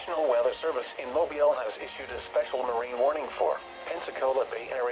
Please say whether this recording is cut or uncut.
cut